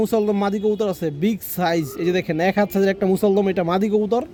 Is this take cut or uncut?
uncut